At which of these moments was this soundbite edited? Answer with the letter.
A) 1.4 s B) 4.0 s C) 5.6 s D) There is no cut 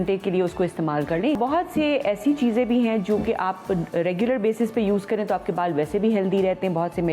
A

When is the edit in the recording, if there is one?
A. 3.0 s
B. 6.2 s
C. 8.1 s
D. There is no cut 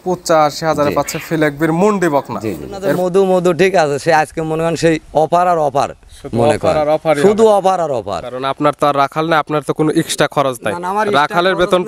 A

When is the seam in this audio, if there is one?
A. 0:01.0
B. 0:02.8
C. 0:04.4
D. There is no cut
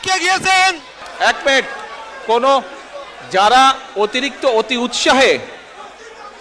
A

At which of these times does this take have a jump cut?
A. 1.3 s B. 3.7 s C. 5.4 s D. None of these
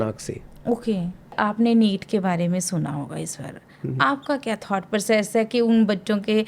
A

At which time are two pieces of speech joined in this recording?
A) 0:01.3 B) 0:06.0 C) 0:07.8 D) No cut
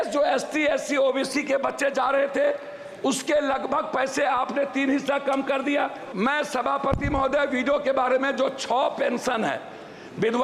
B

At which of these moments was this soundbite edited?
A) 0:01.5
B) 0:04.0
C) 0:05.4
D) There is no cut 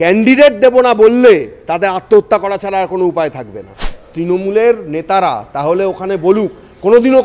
B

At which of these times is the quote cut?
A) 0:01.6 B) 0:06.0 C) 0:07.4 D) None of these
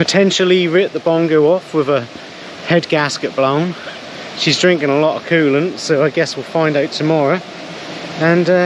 D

